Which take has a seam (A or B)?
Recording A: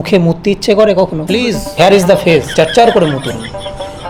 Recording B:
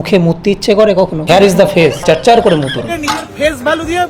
B